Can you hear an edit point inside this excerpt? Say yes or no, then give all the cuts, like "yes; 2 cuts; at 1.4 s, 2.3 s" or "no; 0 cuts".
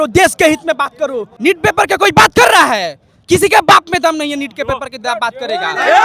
yes; 1 cut; at 1.3 s